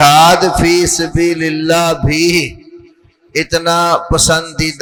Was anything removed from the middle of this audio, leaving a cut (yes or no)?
no